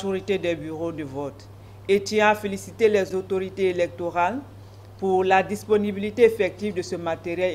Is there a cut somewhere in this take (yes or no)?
yes